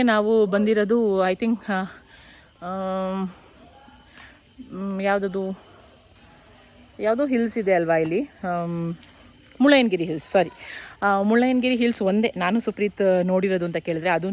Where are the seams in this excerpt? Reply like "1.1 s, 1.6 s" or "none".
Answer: none